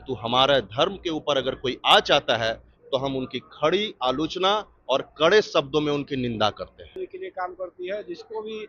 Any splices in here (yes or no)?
yes